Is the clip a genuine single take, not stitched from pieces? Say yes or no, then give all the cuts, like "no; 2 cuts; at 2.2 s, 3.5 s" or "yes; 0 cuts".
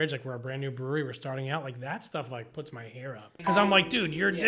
no; 1 cut; at 3.4 s